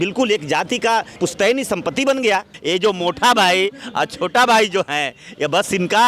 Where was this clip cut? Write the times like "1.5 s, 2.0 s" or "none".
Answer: 1.1 s, 2.5 s